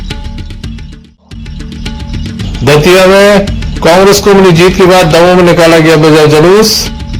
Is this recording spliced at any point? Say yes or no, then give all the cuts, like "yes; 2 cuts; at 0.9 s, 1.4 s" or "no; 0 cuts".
yes; 1 cut; at 1.4 s